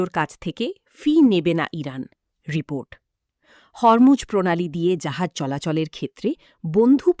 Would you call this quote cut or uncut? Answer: uncut